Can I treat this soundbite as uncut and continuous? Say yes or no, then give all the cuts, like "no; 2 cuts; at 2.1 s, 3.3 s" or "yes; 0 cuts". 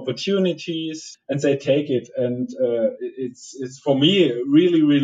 no; 1 cut; at 1.1 s